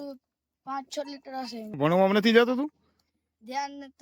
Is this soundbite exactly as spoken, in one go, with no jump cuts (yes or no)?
no